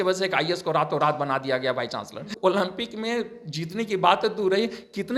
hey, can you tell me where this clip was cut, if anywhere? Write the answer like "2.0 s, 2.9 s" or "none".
2.3 s